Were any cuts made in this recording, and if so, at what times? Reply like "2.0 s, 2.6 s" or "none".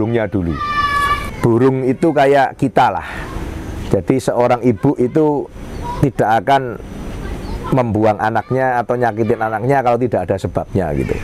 1.3 s